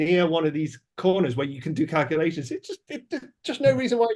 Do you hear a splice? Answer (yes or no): no